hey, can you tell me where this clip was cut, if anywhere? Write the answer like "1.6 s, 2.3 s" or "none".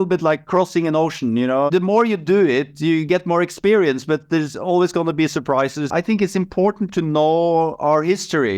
1.7 s, 5.8 s